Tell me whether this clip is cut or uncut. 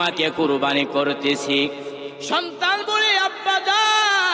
cut